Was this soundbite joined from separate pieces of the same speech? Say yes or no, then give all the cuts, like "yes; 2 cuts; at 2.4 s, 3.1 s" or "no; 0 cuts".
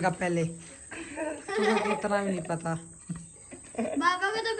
no; 0 cuts